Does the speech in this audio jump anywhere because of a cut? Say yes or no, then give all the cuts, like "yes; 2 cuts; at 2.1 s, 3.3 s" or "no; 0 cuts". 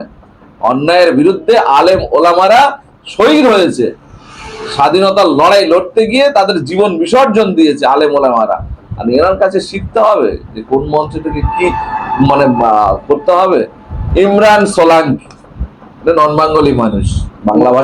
yes; 1 cut; at 14.0 s